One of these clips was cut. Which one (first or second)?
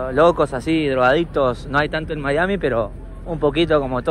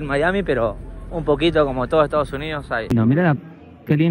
second